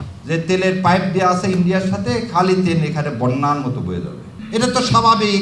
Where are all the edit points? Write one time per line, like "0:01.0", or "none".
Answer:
0:04.3